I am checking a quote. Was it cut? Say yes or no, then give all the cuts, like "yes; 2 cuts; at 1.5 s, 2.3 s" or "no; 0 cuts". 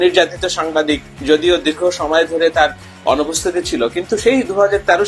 yes; 1 cut; at 1.1 s